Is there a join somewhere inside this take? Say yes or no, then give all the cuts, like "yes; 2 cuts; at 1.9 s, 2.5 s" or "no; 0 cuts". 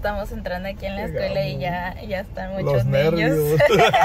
no; 0 cuts